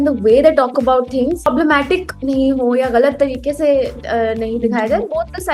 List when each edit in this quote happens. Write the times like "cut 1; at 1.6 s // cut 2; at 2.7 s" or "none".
cut 1; at 1.5 s